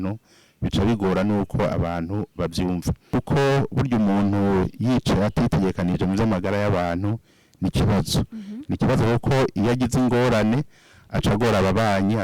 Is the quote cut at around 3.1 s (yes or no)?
yes